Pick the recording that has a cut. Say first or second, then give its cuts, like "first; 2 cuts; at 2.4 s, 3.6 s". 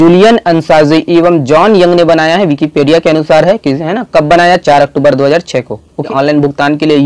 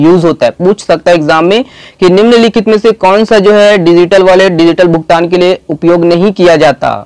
first; 1 cut; at 6.1 s